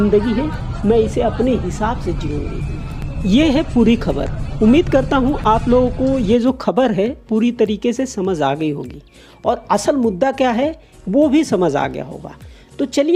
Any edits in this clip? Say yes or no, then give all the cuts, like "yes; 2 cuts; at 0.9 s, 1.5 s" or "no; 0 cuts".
no; 0 cuts